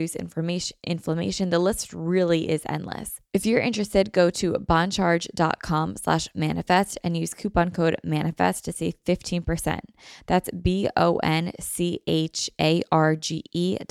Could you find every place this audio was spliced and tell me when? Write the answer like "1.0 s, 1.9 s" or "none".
3.1 s